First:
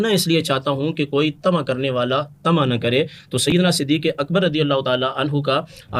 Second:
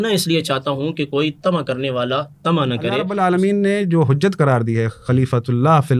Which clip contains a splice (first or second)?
second